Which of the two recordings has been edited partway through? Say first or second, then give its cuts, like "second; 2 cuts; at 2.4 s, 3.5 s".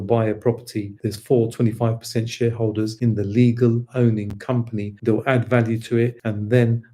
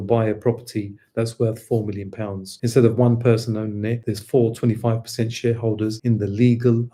first; 3 cuts; at 1.0 s, 4.9 s, 6.1 s